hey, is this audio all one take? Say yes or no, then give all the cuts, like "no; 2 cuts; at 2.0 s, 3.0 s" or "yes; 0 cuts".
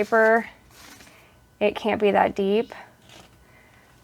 yes; 0 cuts